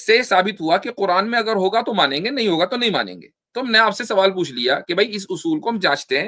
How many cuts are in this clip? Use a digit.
0